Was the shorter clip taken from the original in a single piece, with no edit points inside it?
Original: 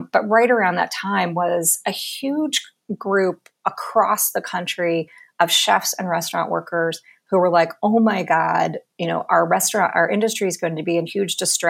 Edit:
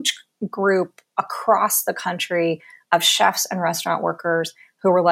yes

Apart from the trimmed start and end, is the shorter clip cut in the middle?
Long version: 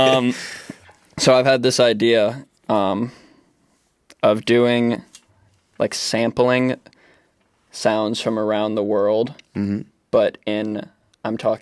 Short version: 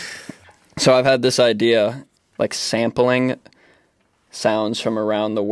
yes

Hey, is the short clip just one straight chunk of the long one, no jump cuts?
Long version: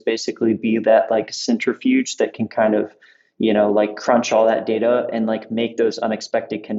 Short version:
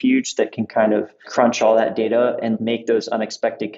no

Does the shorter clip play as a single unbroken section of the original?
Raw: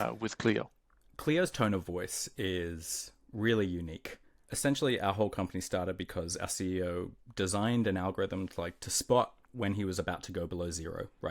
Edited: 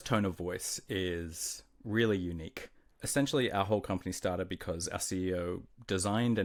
yes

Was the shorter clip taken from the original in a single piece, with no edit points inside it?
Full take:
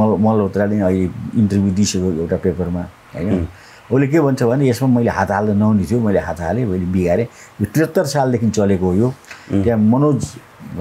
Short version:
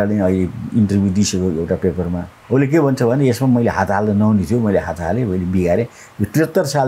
no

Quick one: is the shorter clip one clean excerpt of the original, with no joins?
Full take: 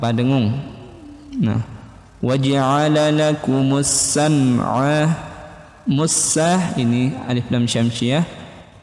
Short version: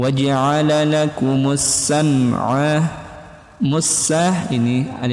yes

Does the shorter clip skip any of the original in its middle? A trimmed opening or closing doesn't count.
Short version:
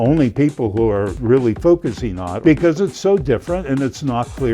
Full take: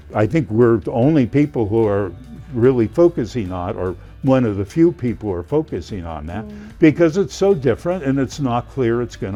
yes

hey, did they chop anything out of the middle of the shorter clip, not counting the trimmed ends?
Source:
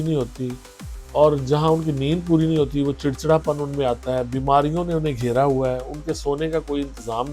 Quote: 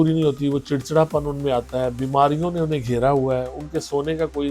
no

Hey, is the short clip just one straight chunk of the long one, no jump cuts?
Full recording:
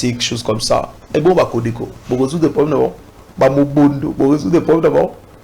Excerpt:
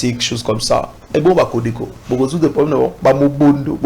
no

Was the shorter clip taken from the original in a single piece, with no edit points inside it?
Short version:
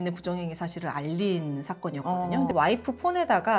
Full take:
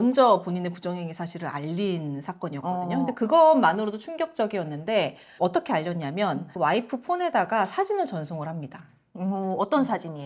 no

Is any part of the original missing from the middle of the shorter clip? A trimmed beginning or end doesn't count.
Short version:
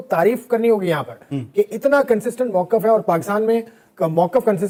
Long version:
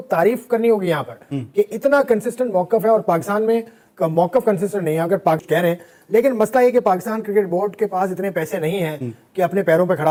no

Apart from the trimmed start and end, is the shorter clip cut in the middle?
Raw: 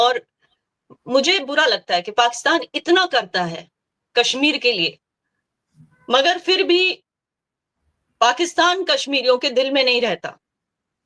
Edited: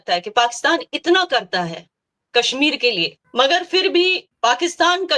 yes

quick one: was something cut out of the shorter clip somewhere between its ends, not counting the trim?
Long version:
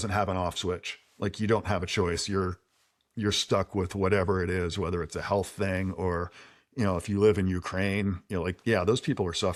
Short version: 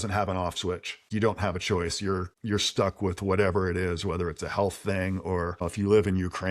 yes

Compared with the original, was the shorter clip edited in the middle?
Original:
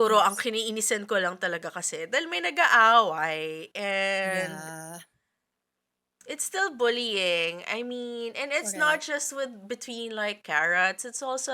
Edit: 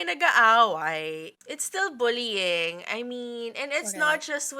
yes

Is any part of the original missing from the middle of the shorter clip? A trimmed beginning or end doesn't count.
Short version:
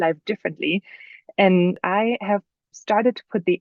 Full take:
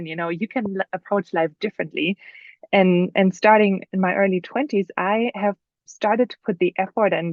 yes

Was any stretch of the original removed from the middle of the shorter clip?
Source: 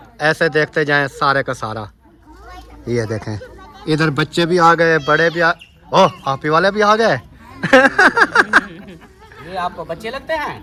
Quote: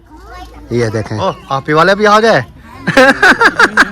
yes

